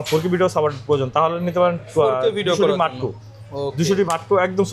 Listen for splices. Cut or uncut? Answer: uncut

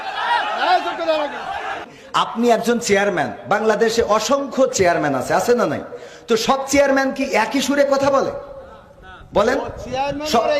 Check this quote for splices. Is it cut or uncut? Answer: cut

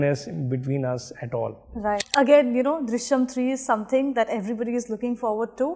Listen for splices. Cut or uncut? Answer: cut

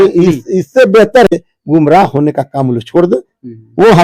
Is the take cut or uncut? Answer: cut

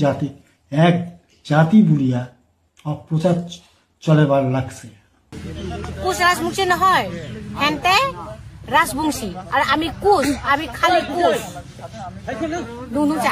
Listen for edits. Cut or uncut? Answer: cut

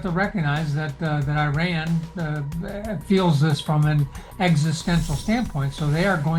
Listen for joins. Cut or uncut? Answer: uncut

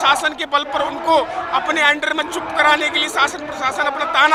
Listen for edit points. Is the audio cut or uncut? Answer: uncut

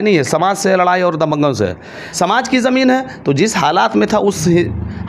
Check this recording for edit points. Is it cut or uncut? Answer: cut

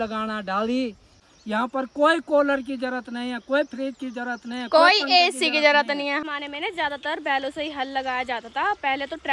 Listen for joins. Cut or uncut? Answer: cut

